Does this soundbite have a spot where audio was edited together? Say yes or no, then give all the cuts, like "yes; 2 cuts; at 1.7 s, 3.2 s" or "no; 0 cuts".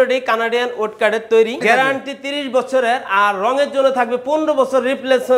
yes; 1 cut; at 1.6 s